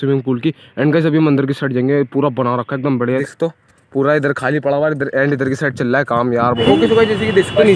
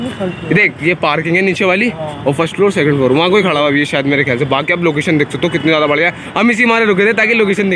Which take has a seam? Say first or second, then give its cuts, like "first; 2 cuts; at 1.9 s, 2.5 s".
first; 2 cuts; at 3.2 s, 6.6 s